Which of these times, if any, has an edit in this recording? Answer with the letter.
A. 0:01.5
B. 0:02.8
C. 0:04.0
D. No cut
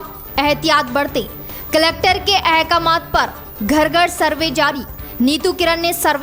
D